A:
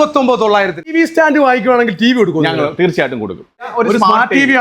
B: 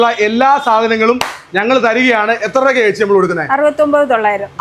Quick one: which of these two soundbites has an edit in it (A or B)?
A